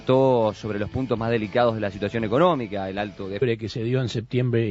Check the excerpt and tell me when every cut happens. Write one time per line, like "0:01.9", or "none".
none